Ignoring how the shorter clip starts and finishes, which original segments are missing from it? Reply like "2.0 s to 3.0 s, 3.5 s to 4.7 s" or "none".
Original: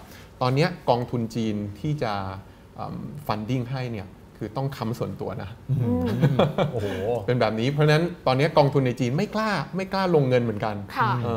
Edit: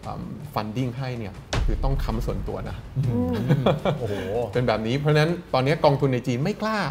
none